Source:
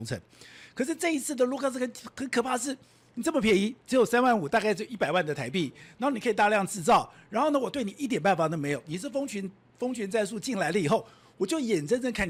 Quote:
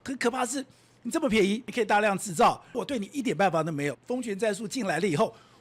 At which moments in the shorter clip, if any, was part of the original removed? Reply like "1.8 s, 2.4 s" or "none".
1.7 s, 2.8 s, 4.0 s